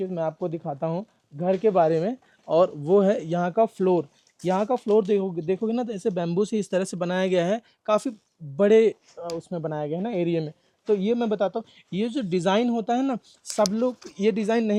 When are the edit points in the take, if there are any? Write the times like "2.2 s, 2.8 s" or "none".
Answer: none